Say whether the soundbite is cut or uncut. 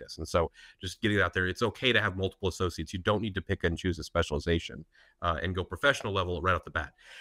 uncut